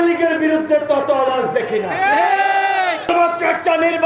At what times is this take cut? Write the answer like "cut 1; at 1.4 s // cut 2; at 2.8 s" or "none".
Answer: cut 1; at 3.1 s